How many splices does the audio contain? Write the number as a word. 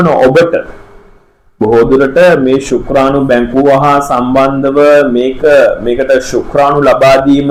zero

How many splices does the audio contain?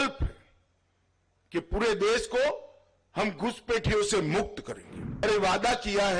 one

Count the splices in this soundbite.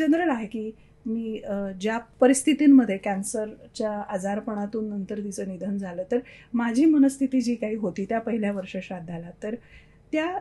one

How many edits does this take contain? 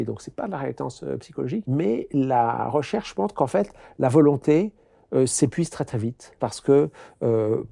two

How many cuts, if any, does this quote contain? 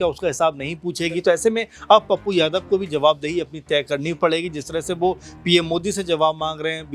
zero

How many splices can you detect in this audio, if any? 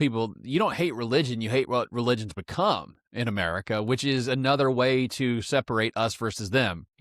zero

